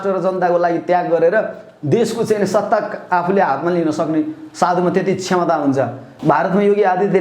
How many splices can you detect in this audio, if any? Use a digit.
1